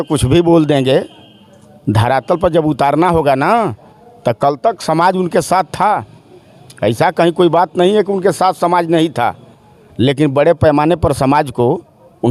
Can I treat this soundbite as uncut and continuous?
yes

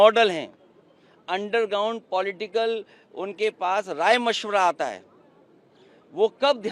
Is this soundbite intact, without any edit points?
yes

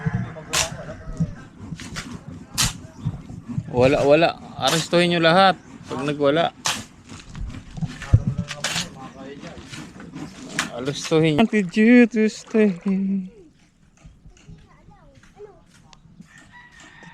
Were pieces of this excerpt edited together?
yes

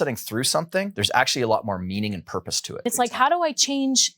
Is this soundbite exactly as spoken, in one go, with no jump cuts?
no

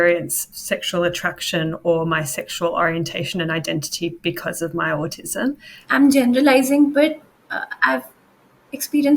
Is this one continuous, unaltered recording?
no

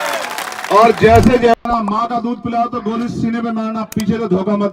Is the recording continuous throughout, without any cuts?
no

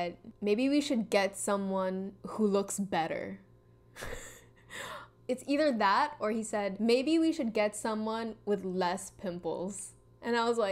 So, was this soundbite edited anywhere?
no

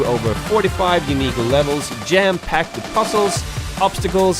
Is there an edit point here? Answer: yes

